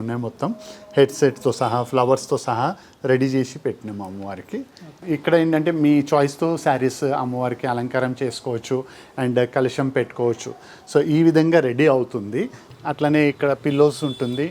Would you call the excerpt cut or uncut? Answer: cut